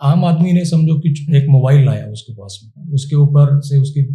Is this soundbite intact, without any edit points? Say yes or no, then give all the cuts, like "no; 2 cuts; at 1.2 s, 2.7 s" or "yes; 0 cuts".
no; 2 cuts; at 1.3 s, 2.8 s